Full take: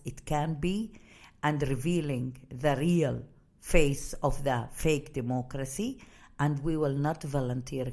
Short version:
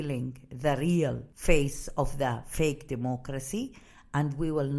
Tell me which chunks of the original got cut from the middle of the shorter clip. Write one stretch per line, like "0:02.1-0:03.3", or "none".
0:03.3-0:03.5